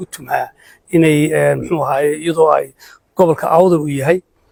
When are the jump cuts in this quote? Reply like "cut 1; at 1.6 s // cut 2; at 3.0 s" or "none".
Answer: none